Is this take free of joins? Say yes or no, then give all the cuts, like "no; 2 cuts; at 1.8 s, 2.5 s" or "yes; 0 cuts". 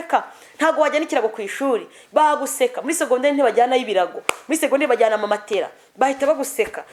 yes; 0 cuts